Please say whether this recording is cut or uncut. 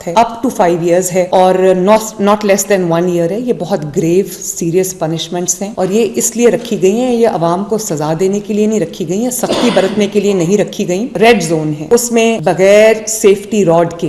cut